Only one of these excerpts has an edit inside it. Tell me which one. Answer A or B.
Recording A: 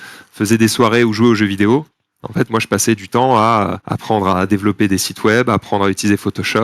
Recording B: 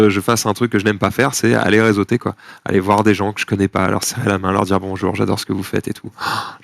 A